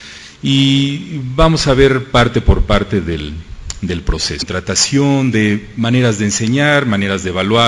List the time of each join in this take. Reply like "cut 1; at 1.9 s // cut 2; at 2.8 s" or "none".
none